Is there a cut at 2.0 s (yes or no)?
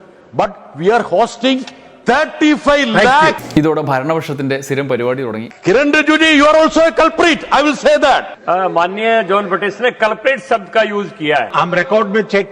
no